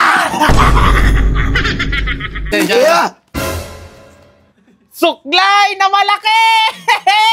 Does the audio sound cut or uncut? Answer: cut